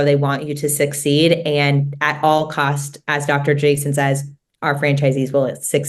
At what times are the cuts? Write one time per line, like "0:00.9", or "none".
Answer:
none